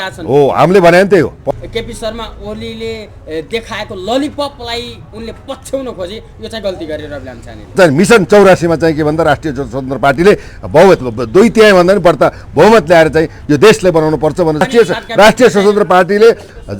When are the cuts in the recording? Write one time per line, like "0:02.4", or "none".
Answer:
0:01.4
0:07.7
0:14.6